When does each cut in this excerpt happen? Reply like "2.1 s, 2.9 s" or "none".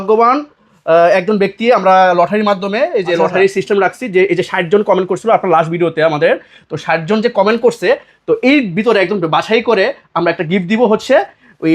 none